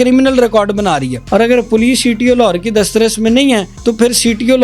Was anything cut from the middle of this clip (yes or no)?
yes